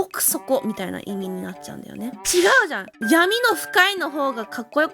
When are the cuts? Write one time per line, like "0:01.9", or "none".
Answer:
0:02.9